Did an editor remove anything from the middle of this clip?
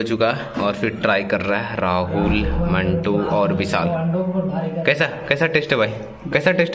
no; 0 cuts

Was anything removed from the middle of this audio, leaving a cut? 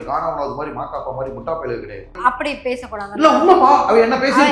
yes; 1 cut; at 2.2 s

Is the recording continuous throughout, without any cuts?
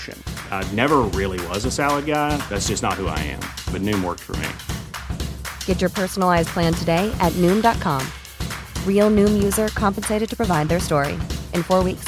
yes; 0 cuts

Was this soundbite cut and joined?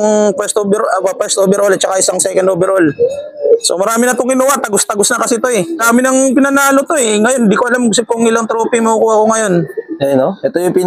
yes; 1 cut; at 5.7 s

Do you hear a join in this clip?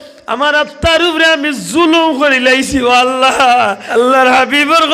yes; 1 cut; at 3.8 s

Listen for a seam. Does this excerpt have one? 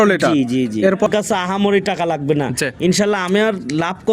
yes; 1 cut; at 1.1 s

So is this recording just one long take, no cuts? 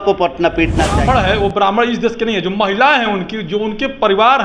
no; 1 cut; at 1.0 s

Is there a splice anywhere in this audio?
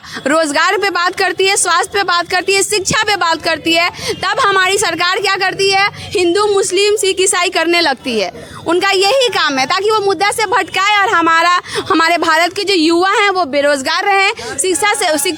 no; 0 cuts

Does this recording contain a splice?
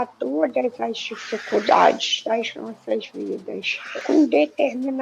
yes; 1 cut; at 4.0 s

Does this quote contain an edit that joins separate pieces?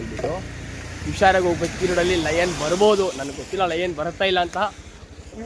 no; 0 cuts

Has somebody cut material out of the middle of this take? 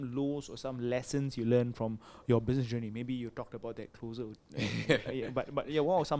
no; 0 cuts

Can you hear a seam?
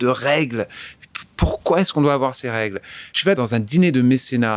yes; 1 cut; at 3.3 s

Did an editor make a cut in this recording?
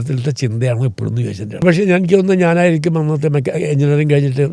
yes; 1 cut; at 1.6 s

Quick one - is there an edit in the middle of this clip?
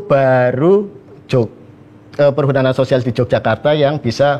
no; 0 cuts

